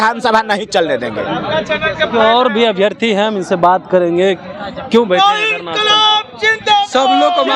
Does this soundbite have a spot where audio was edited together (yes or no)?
no